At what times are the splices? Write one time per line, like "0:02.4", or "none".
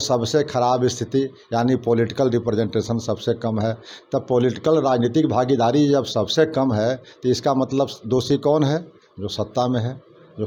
none